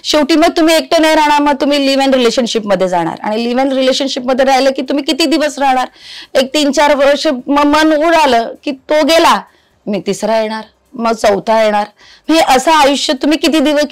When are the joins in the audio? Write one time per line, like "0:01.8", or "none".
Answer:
none